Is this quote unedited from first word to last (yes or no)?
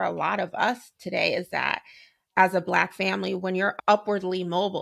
no